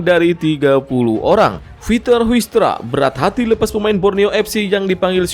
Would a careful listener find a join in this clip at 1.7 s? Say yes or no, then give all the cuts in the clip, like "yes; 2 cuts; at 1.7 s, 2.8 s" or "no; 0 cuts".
yes; 1 cut; at 1.7 s